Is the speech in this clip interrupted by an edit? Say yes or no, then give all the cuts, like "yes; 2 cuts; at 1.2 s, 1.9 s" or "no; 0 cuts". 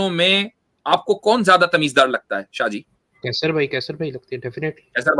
no; 0 cuts